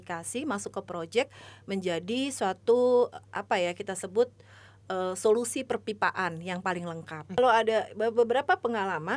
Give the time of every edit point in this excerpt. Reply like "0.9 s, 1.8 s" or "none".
7.4 s